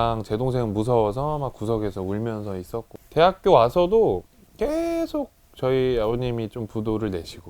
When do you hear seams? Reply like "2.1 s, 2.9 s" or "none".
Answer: 3.0 s